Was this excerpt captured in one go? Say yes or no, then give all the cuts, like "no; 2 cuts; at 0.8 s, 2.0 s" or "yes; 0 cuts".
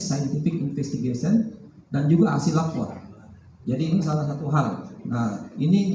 yes; 0 cuts